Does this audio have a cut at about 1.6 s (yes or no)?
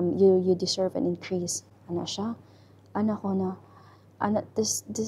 no